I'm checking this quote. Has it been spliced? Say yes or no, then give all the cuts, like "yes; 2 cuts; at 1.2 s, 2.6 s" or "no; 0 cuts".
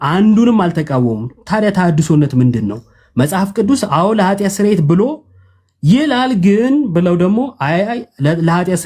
no; 0 cuts